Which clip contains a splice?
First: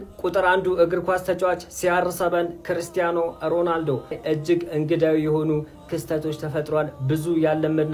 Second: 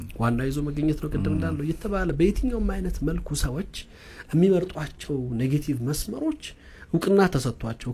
first; 1 cut; at 4.2 s

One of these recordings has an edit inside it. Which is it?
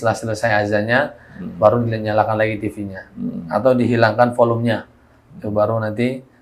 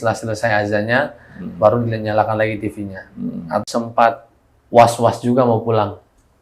second; 1 cut; at 3.6 s

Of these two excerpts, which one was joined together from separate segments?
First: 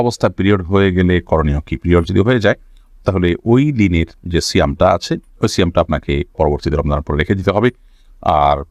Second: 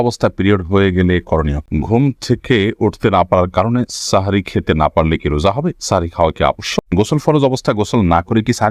second; 2 cuts; at 1.7 s, 7.0 s

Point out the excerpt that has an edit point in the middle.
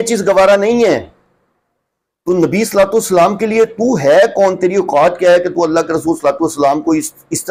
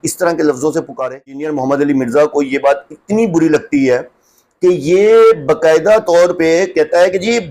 second; 1 cut; at 1.5 s

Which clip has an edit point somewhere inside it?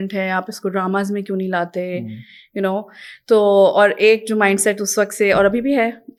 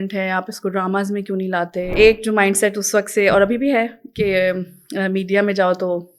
second; 1 cut; at 1.9 s

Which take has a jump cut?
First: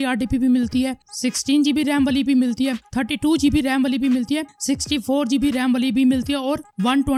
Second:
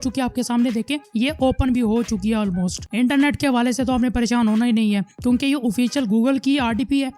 second; 1 cut; at 2.8 s

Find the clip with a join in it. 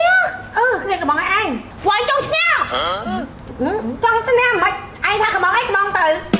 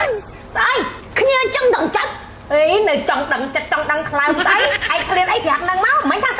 first; 1 cut; at 1.7 s

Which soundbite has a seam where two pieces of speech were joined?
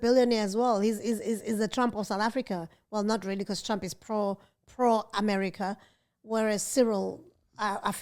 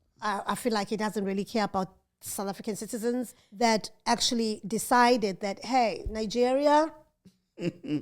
second; 1 cut; at 3.4 s

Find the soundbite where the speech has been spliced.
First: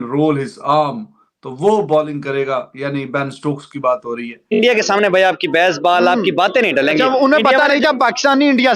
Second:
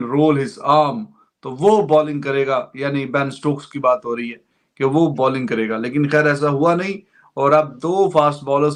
first; 1 cut; at 4.5 s

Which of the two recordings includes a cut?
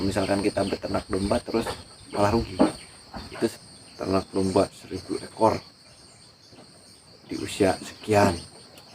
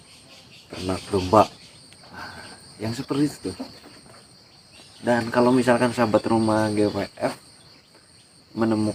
first; 1 cut; at 3.6 s

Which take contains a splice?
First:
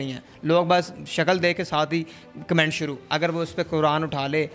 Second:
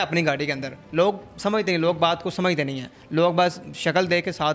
first; 1 cut; at 3.0 s

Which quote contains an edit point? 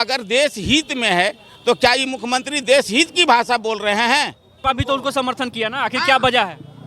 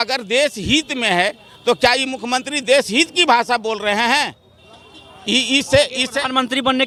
first; 1 cut; at 4.5 s

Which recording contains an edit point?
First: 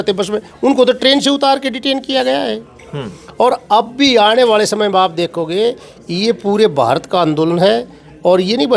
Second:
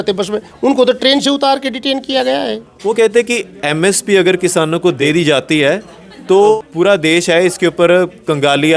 second; 3 cuts; at 2.7 s, 5.0 s, 6.6 s

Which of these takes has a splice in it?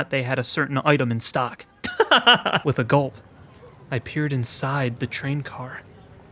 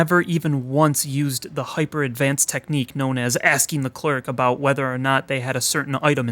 first; 1 cut; at 2.6 s

